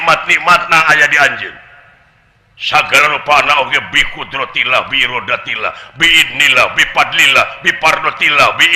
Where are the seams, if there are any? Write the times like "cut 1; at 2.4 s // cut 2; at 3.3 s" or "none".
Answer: none